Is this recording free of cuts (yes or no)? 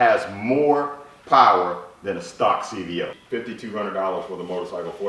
no